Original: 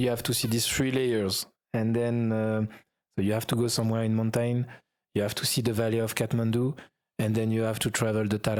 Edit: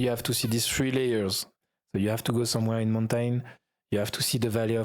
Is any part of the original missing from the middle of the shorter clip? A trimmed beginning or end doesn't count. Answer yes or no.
yes